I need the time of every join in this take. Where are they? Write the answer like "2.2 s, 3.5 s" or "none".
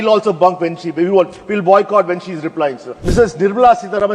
2.9 s